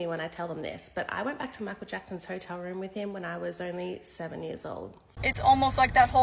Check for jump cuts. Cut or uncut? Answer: cut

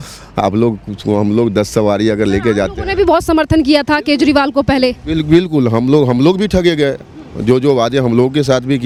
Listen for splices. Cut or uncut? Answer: uncut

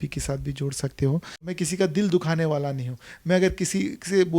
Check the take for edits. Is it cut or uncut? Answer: cut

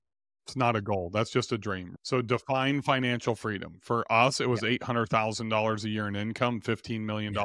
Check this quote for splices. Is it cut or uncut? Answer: cut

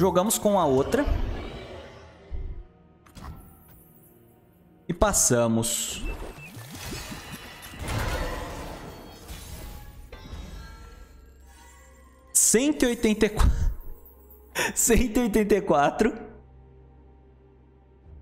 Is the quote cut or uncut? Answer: uncut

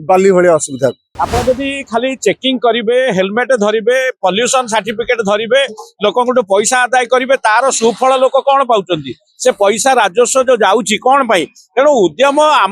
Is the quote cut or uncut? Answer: cut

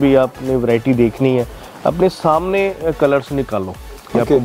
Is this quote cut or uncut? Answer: uncut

